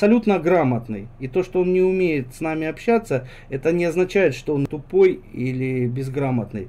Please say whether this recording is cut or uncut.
cut